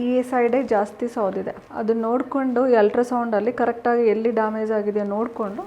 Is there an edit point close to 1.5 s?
no; 0 cuts

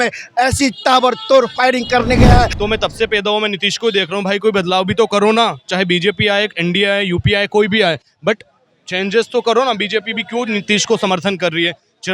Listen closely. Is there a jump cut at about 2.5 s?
yes; 1 cut; at 2.5 s

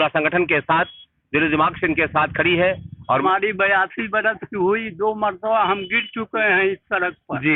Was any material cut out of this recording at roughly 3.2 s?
yes; 1 cut; at 3.2 s

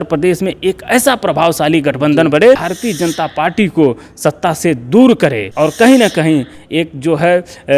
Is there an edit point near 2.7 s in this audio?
yes; 2 cuts; at 2.7 s, 5.4 s

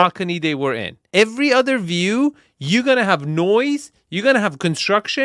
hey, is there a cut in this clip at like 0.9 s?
yes; 1 cut; at 0.9 s

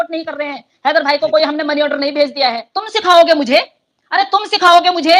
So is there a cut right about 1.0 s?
no; 1 cut; at 2.7 s

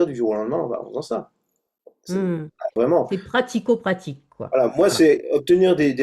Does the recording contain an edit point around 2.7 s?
yes; 1 cut; at 2.7 s

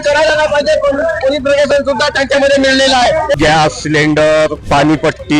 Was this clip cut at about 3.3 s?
yes; 2 cuts; at 3.3 s, 4.6 s

